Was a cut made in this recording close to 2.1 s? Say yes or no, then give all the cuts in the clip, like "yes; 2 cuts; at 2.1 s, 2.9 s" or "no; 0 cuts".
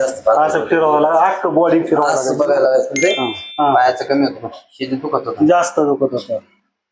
no; 1 cut; at 3.4 s